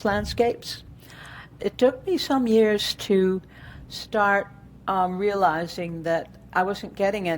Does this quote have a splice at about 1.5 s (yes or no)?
yes